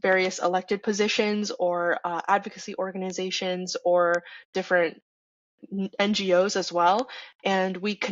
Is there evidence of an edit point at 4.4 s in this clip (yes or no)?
yes